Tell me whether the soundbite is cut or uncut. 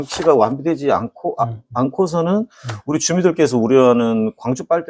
uncut